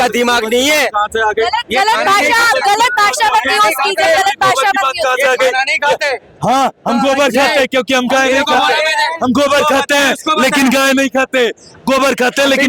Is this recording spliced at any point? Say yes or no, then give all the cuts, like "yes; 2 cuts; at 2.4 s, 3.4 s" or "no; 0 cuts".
no; 0 cuts